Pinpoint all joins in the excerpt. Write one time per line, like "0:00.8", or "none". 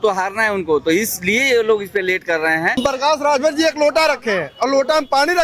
0:02.8